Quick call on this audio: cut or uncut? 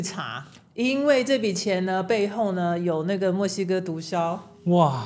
uncut